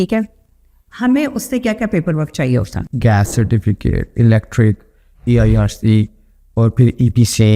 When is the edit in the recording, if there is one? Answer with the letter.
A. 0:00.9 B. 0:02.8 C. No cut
B